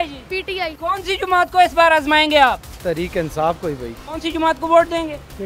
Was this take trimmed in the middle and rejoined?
no; 0 cuts

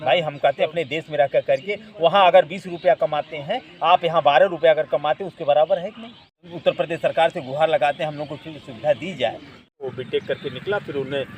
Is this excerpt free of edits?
no; 2 cuts; at 6.5 s, 9.9 s

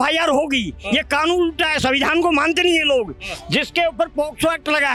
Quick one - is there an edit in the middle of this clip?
no; 0 cuts

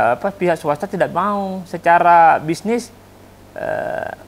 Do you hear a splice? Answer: no; 0 cuts

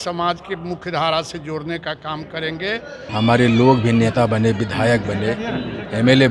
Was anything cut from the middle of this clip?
yes; 1 cut; at 3.0 s

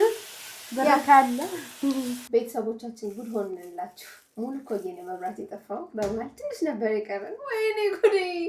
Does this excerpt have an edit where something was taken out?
yes; 1 cut; at 2.2 s

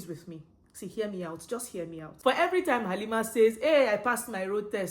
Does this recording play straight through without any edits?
no; 1 cut; at 2.1 s

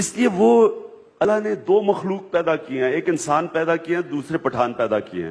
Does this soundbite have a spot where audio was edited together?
yes; 1 cut; at 1.2 s

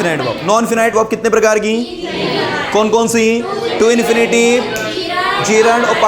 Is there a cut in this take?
yes; 1 cut; at 0.9 s

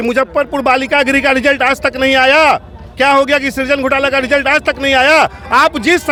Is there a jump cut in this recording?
no; 0 cuts

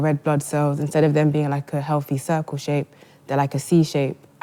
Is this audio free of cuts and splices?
yes; 0 cuts

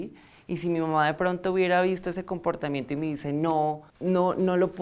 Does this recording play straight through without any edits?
no; 1 cut; at 3.9 s

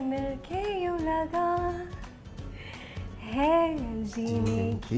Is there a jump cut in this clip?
no; 0 cuts

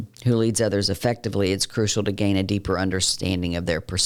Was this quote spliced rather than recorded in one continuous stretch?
no; 0 cuts

